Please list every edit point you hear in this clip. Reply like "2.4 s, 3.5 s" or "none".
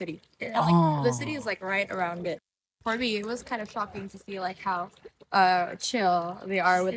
2.7 s